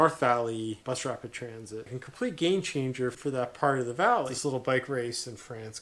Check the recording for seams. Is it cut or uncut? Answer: cut